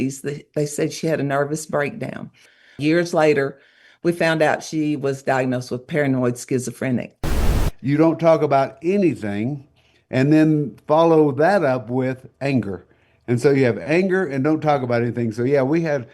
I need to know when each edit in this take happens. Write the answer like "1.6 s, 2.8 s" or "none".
2.8 s, 7.6 s